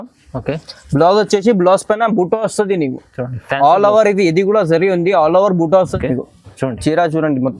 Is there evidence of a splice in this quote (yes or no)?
yes